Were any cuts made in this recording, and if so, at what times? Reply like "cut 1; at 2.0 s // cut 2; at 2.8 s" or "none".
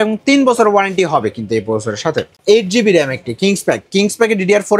cut 1; at 2.4 s